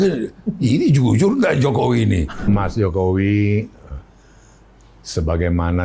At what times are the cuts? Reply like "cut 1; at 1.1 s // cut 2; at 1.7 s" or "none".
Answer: cut 1; at 2.4 s